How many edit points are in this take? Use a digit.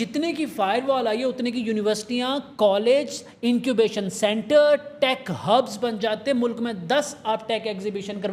0